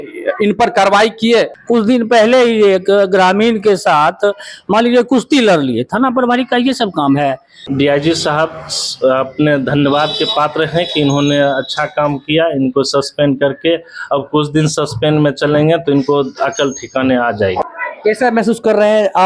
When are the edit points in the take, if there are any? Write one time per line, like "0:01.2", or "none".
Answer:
0:01.6
0:07.7
0:17.7